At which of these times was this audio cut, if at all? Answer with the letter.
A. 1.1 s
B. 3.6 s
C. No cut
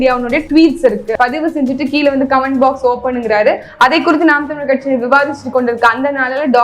A